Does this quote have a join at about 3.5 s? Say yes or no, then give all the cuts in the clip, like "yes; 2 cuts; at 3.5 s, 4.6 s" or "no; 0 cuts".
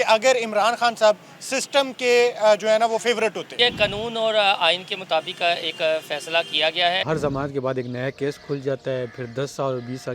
yes; 2 cuts; at 3.5 s, 7.0 s